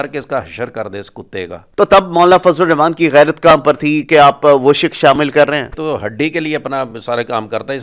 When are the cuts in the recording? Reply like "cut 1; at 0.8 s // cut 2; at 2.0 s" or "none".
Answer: cut 1; at 1.6 s // cut 2; at 5.7 s